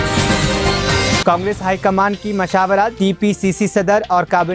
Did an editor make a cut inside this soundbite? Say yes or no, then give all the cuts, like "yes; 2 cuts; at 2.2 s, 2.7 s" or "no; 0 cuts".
no; 0 cuts